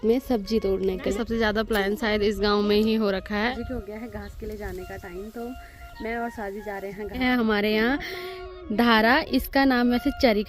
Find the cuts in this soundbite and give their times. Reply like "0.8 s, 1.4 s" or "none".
1.1 s, 3.6 s, 7.2 s